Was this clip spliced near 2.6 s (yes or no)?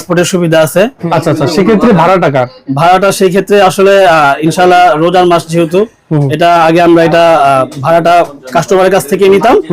no